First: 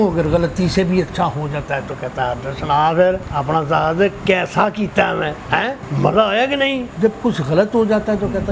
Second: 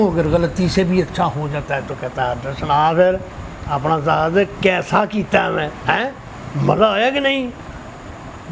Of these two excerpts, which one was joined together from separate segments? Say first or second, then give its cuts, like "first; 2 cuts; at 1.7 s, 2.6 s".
first; 3 cuts; at 3.3 s, 5.8 s, 6.9 s